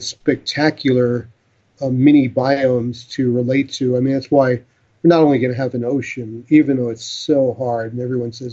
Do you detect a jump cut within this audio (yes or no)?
no